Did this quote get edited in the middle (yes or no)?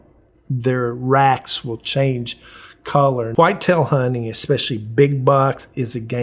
yes